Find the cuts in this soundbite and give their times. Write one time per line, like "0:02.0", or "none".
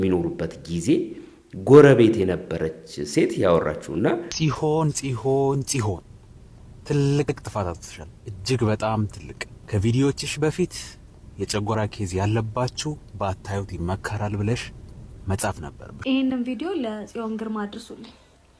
0:04.3
0:16.1